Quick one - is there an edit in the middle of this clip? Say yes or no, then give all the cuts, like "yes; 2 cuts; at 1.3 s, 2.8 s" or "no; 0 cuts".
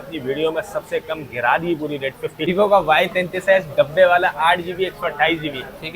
yes; 1 cut; at 2.5 s